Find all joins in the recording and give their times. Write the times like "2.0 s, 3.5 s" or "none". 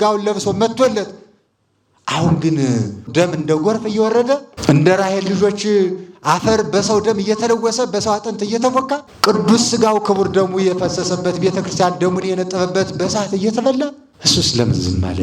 3.0 s, 4.5 s, 9.1 s, 14.1 s